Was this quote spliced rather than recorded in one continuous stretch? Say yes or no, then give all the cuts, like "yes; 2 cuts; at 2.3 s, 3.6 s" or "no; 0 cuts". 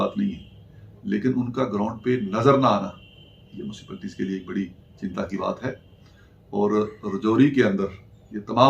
no; 0 cuts